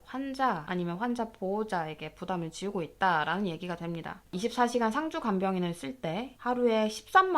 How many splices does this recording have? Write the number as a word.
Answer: one